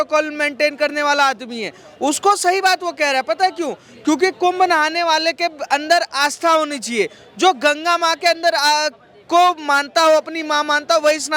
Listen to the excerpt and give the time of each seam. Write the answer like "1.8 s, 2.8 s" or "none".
none